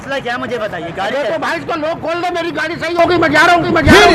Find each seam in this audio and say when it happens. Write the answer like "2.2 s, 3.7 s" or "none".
none